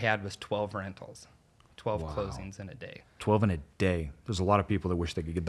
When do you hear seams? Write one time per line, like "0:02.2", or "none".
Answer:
0:03.1

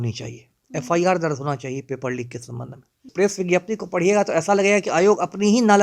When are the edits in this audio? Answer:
0:03.0

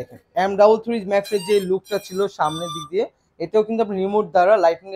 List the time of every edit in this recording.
none

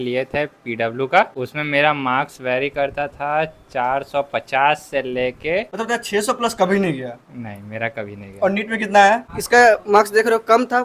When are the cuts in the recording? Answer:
0:01.4
0:05.7
0:09.3

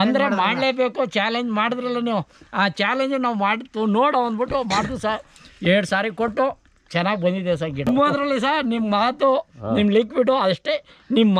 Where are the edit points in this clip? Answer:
0:07.9

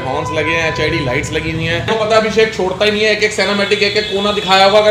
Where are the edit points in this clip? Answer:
0:01.9

